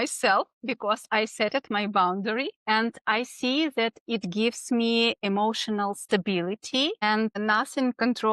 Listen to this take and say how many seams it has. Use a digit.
2